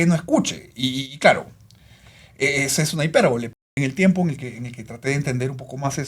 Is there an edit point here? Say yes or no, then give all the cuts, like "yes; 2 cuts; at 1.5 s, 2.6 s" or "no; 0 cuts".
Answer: yes; 1 cut; at 3.5 s